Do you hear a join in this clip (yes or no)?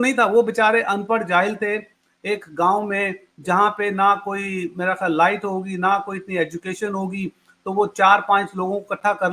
no